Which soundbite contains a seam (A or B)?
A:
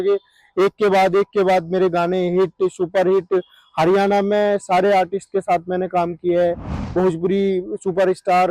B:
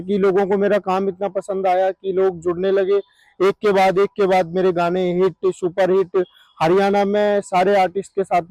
A